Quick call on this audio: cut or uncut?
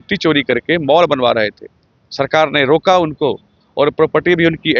uncut